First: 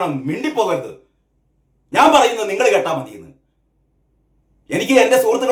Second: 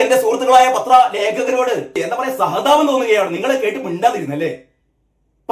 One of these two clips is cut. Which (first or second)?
second